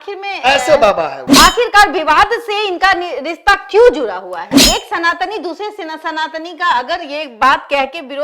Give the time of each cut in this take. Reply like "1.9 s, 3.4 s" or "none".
1.2 s, 4.6 s